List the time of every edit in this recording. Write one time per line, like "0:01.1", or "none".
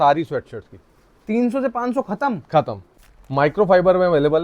0:02.8